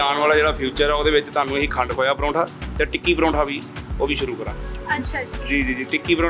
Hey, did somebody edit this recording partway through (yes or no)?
no